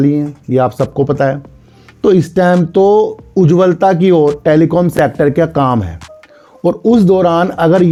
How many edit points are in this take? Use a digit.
0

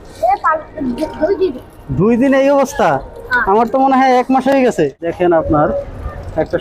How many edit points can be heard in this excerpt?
1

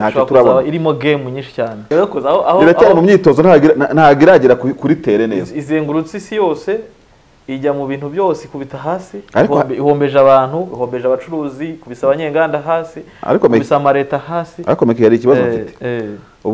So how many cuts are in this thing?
1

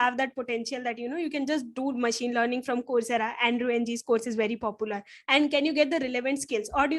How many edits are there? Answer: 0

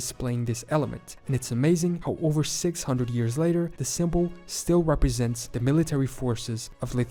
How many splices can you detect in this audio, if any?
0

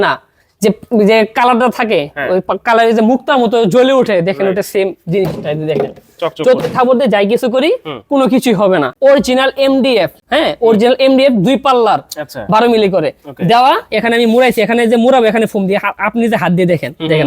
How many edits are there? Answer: 2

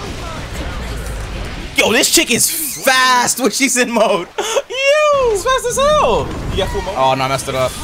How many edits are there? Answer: 2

